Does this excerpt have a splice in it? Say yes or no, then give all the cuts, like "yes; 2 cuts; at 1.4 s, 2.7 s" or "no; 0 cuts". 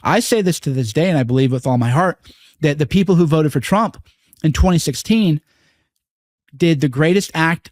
no; 0 cuts